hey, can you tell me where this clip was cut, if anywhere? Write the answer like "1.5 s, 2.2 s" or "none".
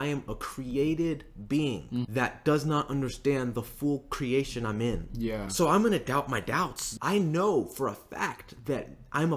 2.1 s, 5.5 s, 6.8 s